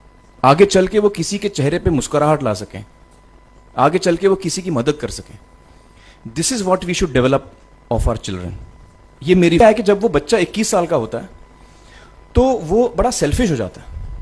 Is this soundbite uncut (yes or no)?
no